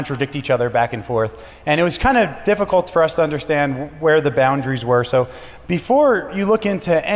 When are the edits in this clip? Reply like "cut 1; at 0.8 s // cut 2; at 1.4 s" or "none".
cut 1; at 0.9 s

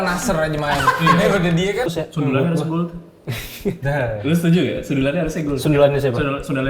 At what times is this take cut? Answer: cut 1; at 1.9 s

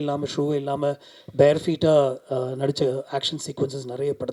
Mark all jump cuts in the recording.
none

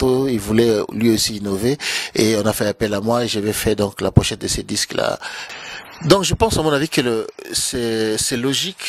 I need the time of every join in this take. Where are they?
cut 1; at 5.3 s

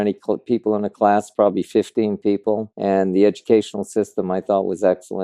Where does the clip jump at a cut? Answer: cut 1; at 2.7 s

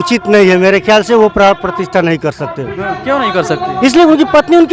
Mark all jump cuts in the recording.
none

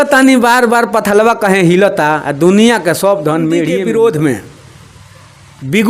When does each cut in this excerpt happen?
cut 1; at 3.7 s

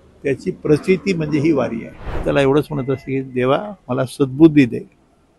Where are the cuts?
cut 1; at 2.2 s

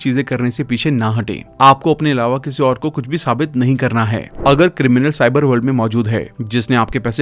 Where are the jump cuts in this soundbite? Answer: cut 1; at 4.3 s

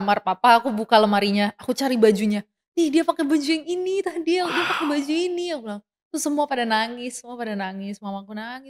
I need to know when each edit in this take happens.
none

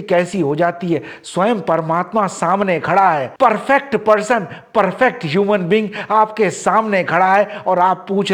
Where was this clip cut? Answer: none

